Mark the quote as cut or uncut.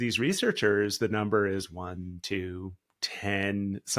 uncut